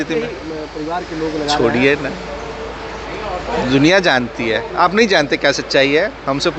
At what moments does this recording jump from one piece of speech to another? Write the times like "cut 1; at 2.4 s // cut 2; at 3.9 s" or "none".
none